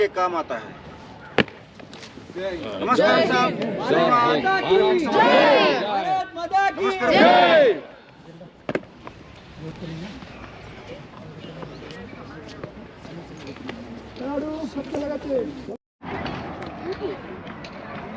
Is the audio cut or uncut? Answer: uncut